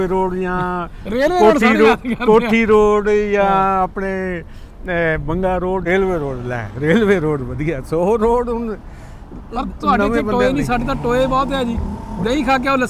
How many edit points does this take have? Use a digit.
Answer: 1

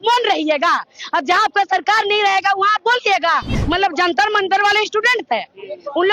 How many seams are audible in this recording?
1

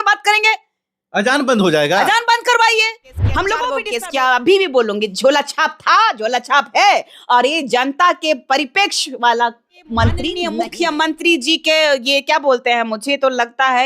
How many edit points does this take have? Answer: 2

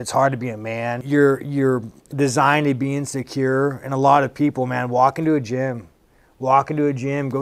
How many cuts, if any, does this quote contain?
1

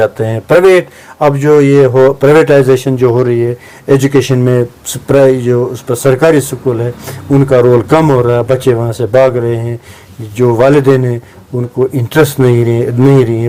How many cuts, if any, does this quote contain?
0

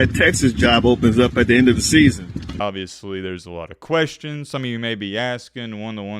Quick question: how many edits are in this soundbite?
1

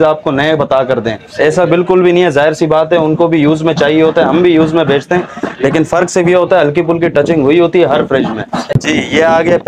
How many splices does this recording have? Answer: 1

